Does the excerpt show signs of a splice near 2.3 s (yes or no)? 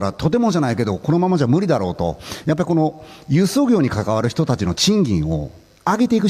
yes